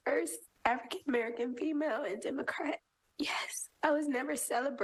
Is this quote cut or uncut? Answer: uncut